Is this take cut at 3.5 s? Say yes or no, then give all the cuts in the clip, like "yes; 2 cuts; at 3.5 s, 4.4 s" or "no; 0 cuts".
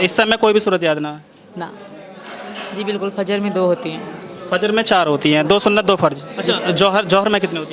no; 2 cuts; at 1.9 s, 6.3 s